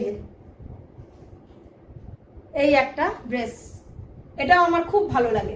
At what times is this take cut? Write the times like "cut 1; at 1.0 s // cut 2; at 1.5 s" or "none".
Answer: none